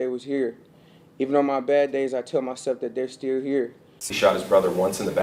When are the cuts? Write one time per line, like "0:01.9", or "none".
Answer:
0:04.0